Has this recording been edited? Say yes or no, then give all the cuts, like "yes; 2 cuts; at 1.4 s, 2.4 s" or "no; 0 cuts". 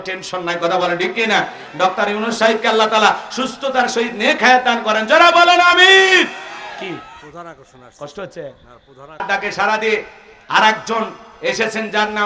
yes; 1 cut; at 9.2 s